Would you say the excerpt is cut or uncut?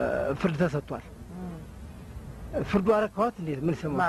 uncut